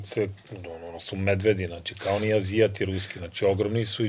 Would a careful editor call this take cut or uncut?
uncut